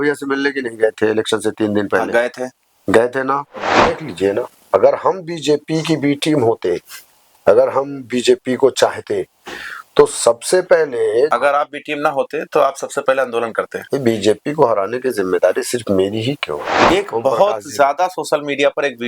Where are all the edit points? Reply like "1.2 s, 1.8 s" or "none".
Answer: 3.8 s, 11.3 s, 16.8 s